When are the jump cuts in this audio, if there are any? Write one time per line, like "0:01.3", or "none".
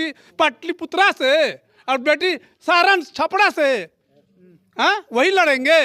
none